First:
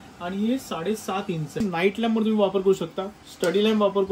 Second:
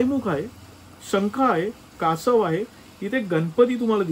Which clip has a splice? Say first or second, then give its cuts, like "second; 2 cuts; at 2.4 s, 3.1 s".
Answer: first; 1 cut; at 1.6 s